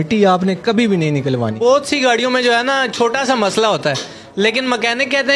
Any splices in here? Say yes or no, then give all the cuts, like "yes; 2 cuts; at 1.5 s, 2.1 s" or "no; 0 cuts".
yes; 1 cut; at 1.6 s